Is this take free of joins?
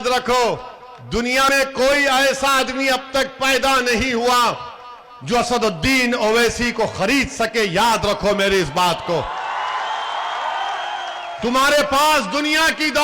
no; 1 cut; at 1.5 s

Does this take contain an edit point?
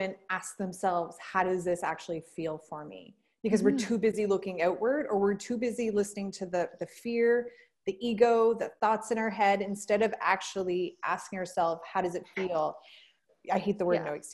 yes; 1 cut; at 13.2 s

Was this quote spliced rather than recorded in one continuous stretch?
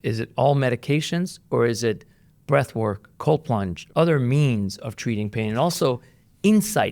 yes; 2 cuts; at 3.1 s, 3.8 s

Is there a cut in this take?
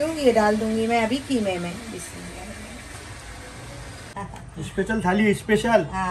yes; 1 cut; at 4.1 s

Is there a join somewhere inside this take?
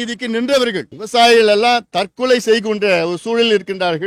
yes; 1 cut; at 0.9 s

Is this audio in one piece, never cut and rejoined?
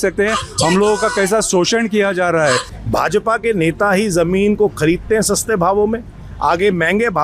no; 1 cut; at 2.7 s

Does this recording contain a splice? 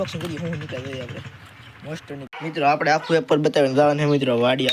yes; 1 cut; at 2.2 s

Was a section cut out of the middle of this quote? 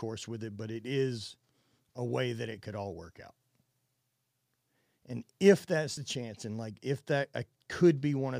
yes; 1 cut; at 6.0 s

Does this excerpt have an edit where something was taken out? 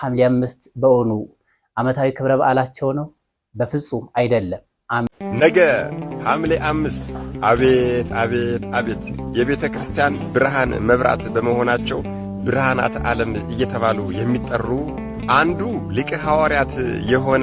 yes; 1 cut; at 5.1 s

